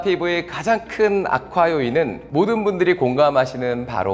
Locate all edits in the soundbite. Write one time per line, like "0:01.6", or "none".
none

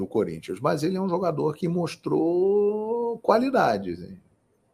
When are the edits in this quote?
none

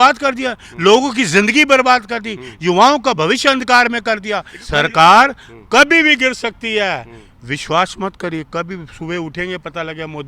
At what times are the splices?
0:04.6

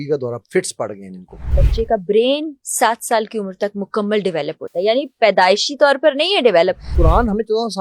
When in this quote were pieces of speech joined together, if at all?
0:01.6
0:06.9

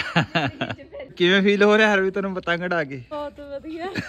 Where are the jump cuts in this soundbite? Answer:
0:01.1
0:03.1

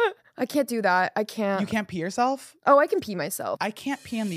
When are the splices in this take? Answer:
0:03.4

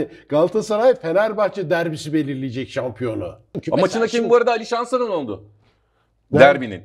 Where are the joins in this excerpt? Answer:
0:03.5

